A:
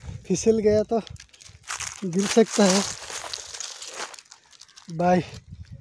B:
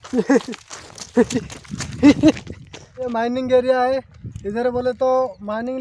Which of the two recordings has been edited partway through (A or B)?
B